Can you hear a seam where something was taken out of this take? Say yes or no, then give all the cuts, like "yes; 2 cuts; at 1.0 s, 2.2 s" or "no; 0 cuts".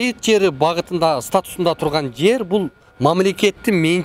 no; 0 cuts